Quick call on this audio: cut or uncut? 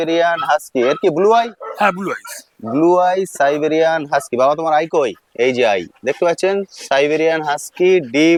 uncut